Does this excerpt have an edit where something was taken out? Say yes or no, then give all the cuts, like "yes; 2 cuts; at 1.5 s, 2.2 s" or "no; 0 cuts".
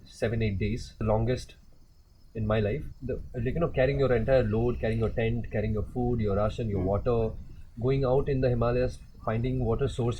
yes; 2 cuts; at 1.0 s, 2.9 s